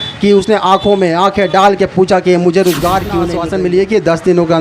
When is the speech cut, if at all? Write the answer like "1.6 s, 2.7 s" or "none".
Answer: 3.3 s